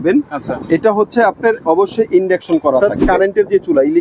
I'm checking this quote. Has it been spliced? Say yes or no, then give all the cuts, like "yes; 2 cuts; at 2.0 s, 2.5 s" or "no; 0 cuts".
yes; 1 cut; at 2.8 s